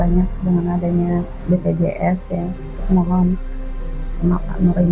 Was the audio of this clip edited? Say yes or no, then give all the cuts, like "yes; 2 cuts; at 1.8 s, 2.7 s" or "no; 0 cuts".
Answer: yes; 2 cuts; at 1.3 s, 2.7 s